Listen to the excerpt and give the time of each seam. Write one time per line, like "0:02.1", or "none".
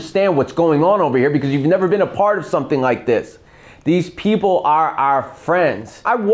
none